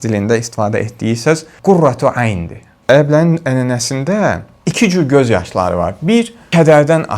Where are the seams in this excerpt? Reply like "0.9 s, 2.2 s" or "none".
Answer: 2.7 s